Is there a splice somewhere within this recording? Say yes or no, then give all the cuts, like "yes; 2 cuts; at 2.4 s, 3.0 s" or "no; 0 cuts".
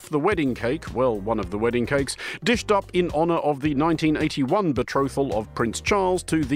no; 0 cuts